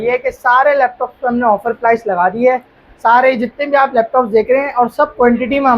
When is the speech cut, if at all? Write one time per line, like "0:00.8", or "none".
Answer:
none